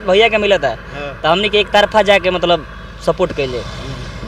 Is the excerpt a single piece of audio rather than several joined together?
yes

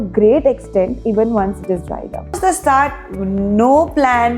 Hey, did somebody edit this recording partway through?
yes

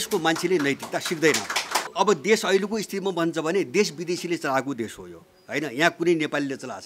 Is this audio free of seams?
no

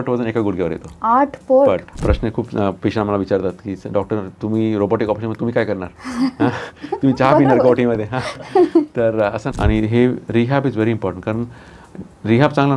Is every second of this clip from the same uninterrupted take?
no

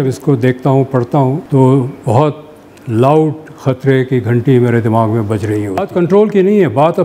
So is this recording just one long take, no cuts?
no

